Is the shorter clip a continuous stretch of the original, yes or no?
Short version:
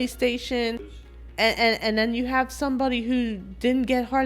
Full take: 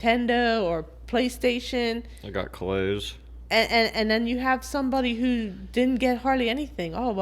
no